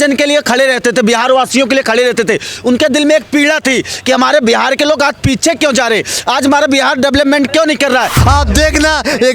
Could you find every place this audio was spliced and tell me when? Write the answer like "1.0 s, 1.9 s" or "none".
8.2 s